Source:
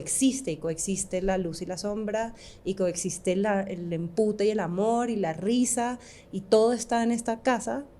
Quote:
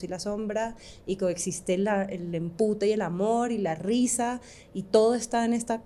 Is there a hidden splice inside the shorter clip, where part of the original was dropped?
no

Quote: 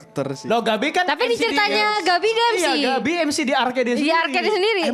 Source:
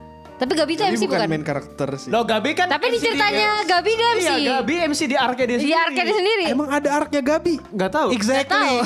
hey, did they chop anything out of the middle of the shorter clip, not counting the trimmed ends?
no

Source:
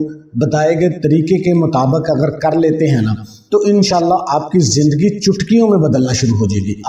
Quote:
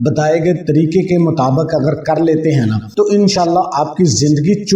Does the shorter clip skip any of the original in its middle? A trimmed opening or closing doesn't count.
yes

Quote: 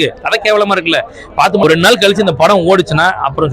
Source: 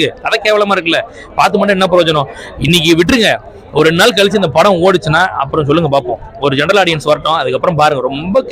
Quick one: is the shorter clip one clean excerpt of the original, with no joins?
no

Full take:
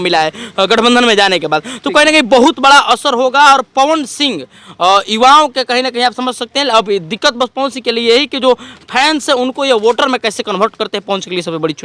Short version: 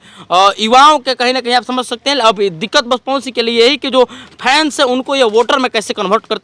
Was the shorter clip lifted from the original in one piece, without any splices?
yes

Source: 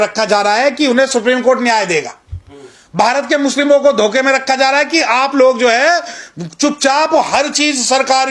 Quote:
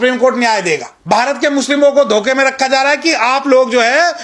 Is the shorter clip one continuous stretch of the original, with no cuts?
no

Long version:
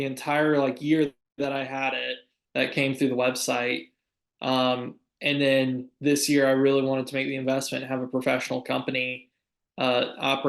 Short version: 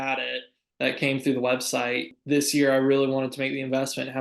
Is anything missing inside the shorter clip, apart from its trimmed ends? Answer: yes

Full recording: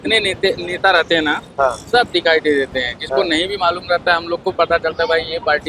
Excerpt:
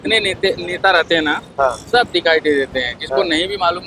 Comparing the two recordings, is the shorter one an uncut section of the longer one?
yes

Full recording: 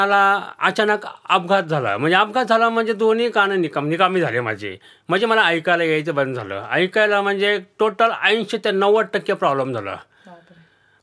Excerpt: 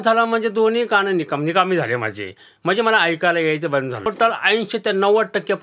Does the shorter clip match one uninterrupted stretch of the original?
no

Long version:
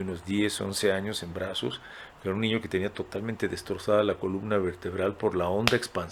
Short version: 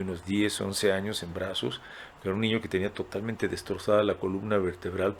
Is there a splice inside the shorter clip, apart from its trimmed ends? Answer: no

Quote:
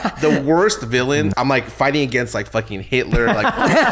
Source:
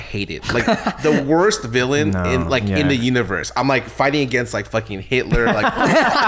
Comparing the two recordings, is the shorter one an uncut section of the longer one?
no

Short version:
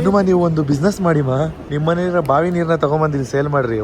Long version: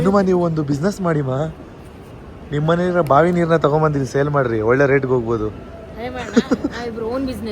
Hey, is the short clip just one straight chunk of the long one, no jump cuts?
no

